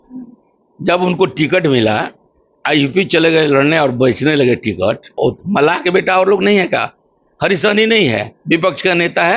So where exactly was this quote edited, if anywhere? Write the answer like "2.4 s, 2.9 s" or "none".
5.1 s

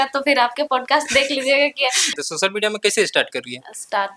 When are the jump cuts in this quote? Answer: 2.2 s

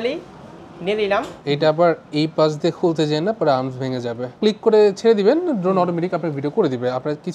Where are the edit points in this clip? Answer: 1.4 s, 4.3 s

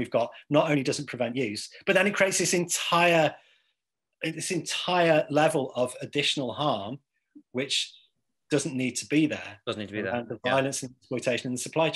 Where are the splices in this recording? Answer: none

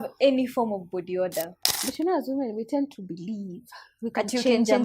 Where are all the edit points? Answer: 1.6 s

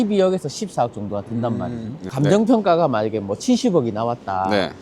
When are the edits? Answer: 2.0 s

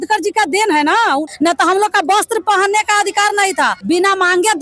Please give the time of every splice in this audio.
1.2 s, 3.8 s

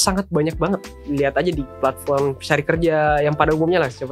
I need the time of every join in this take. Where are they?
0.9 s, 1.8 s

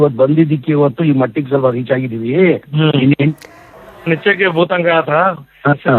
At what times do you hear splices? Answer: 3.5 s

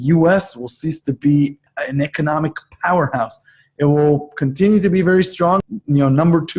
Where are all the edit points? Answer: 1.6 s, 5.6 s

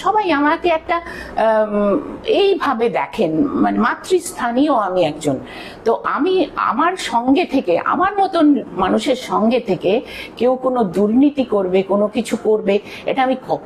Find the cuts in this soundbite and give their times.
none

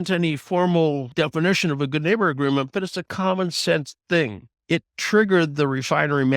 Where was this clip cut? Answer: 1.0 s, 4.5 s

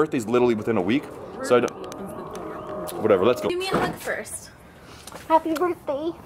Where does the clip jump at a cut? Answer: none

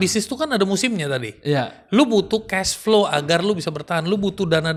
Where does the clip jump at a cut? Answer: none

